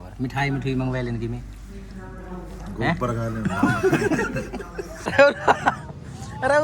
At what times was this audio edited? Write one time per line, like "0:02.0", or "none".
0:05.1